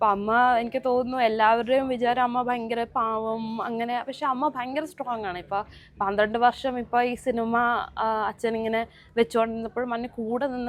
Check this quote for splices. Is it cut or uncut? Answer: uncut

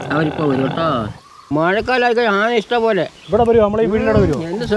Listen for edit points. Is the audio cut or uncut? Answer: cut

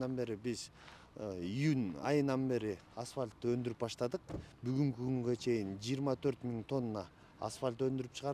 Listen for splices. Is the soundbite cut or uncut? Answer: uncut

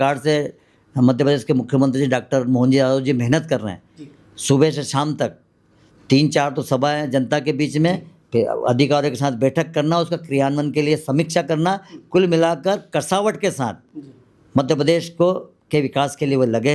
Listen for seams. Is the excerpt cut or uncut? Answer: uncut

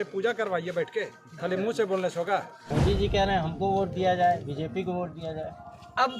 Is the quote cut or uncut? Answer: cut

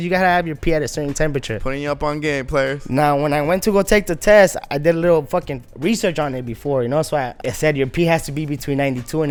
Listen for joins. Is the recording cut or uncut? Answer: uncut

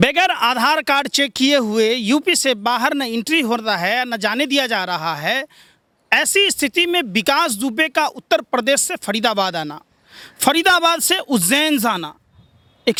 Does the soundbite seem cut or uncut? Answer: uncut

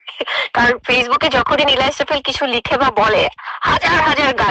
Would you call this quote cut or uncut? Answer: uncut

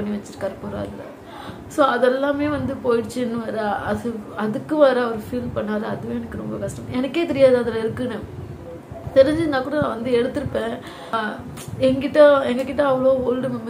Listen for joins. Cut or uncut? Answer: cut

